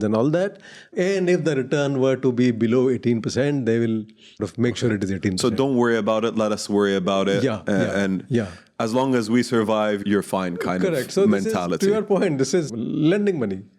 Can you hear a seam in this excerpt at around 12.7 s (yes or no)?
yes